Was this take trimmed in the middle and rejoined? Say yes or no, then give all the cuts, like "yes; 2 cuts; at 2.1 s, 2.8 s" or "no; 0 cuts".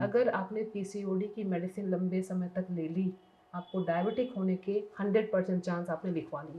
no; 0 cuts